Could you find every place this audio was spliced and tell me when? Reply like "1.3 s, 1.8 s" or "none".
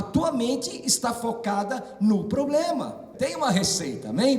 3.1 s